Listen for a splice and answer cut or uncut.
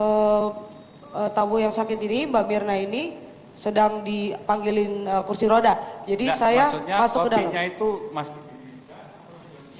uncut